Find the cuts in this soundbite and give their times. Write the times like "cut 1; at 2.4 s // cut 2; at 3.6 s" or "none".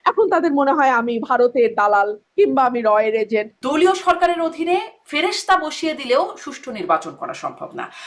cut 1; at 3.5 s